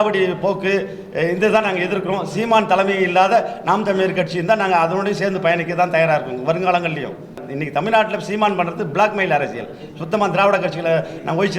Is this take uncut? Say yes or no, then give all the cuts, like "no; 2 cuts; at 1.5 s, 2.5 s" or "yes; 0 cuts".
no; 1 cut; at 7.5 s